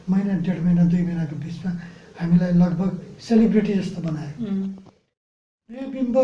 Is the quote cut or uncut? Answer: cut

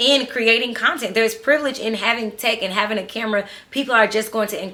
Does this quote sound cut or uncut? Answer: uncut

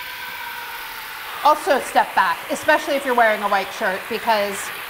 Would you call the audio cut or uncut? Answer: cut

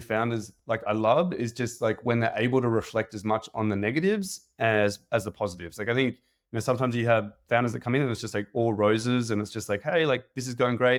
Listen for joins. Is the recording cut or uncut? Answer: uncut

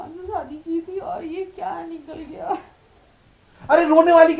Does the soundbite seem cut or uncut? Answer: uncut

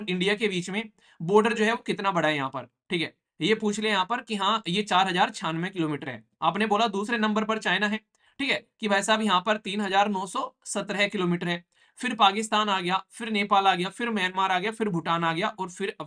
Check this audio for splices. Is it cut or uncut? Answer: uncut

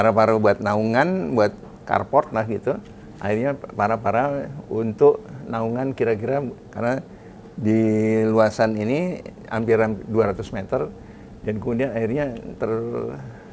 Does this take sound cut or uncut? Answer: uncut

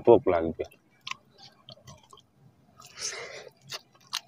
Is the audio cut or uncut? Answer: cut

